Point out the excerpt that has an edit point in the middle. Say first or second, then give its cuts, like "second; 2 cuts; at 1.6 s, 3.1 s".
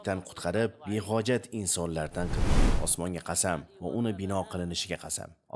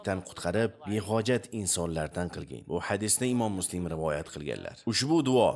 first; 1 cut; at 2.5 s